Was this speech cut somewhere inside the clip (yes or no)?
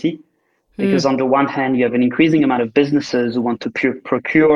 no